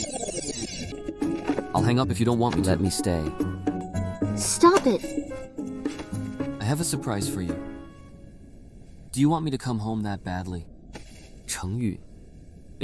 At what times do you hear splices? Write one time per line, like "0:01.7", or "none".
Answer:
0:01.0